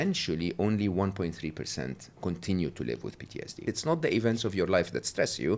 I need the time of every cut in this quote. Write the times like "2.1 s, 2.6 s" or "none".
2.2 s, 3.6 s